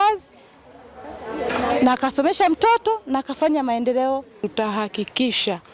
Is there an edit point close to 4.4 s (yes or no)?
yes